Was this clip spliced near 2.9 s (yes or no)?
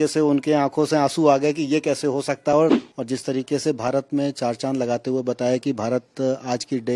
yes